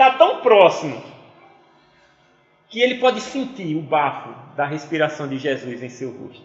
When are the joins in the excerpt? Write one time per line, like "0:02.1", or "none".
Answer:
none